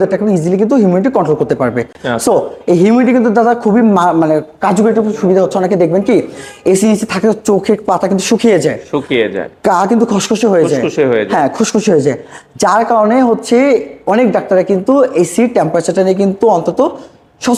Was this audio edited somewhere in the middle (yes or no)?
no